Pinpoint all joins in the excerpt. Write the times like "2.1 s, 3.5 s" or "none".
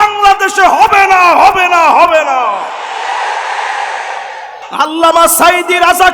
4.6 s

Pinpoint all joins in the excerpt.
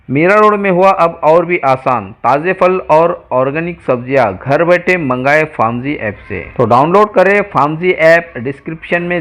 none

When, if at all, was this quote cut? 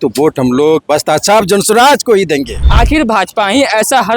2.6 s

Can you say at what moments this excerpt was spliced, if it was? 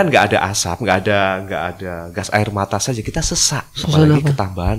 3.8 s

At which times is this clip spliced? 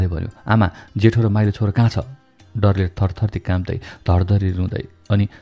none

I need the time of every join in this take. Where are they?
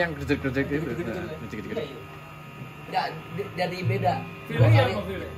none

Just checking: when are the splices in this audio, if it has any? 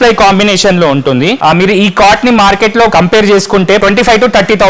1.4 s, 2.9 s, 3.8 s

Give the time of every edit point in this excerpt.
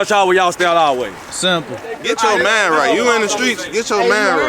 1.9 s

